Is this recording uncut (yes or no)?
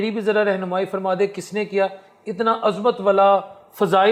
yes